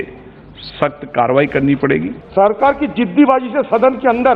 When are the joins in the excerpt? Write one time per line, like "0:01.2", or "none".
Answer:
0:02.1

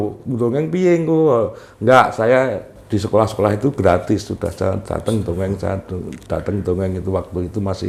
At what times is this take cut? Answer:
none

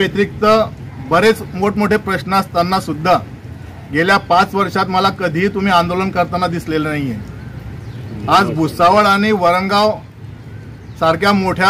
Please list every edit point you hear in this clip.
none

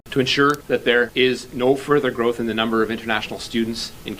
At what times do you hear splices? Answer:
0:00.9

